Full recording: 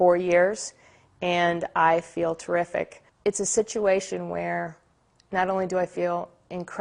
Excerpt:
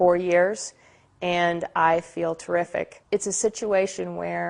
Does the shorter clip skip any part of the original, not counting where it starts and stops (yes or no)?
yes